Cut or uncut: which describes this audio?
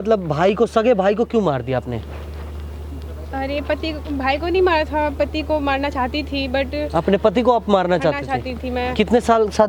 uncut